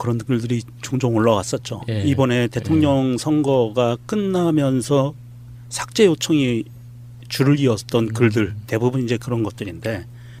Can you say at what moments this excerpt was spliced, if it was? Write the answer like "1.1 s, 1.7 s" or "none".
none